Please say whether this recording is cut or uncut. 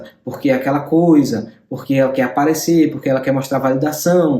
uncut